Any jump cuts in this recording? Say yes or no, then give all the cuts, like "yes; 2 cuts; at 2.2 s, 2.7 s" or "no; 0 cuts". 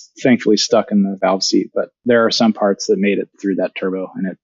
yes; 2 cuts; at 1.9 s, 3.3 s